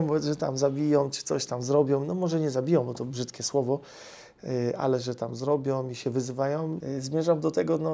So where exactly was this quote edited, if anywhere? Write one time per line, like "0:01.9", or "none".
0:06.8